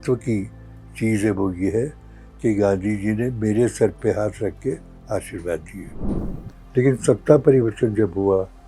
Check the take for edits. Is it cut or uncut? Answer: cut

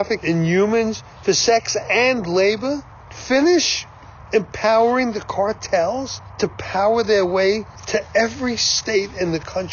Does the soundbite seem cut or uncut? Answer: uncut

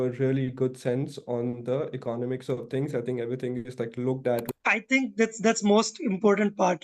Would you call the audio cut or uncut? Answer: cut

